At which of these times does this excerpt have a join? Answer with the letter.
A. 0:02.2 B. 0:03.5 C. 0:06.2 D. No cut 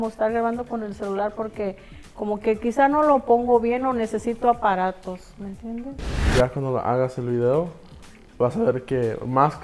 C